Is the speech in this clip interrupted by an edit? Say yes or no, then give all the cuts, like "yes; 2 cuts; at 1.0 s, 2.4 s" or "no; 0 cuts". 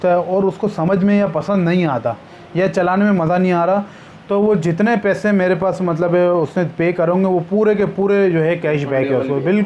no; 0 cuts